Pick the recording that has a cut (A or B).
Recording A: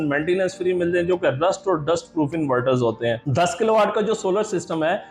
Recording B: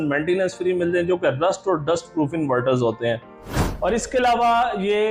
A